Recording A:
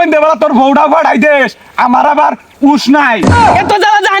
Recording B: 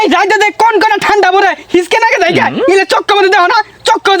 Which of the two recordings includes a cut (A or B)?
A